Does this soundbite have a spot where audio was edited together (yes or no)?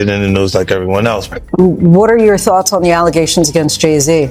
no